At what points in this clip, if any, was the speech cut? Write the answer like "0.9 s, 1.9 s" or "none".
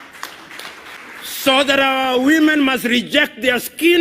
0.9 s